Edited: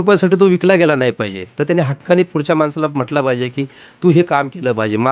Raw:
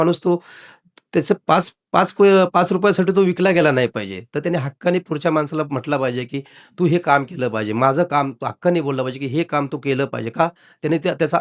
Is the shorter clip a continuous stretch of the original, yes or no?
yes